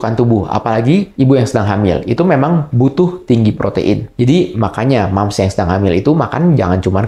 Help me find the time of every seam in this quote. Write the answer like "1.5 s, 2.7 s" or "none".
none